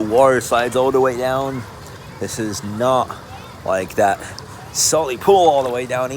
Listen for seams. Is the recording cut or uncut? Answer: uncut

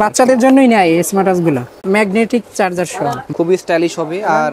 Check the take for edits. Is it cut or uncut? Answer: cut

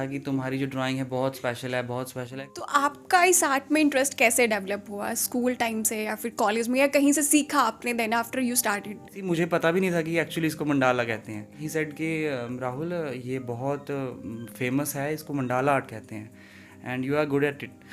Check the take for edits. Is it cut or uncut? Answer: cut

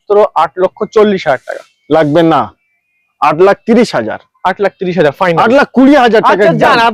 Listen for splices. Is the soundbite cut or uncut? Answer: uncut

